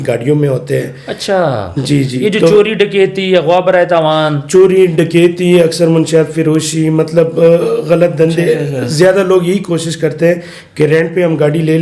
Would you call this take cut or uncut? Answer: uncut